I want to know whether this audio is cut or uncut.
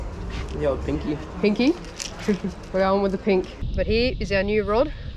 cut